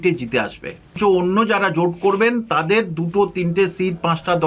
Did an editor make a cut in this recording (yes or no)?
yes